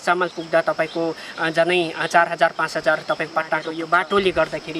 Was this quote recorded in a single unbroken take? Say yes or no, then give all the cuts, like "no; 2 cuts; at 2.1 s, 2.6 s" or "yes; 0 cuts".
no; 1 cut; at 3.7 s